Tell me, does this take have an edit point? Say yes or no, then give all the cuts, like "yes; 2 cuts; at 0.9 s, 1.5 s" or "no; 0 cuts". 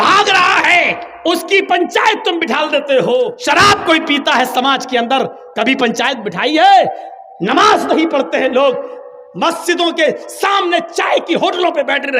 yes; 1 cut; at 3.3 s